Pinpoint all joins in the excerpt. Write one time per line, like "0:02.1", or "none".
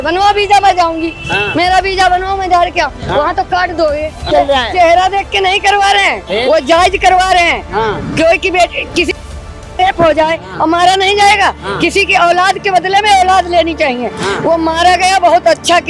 0:04.2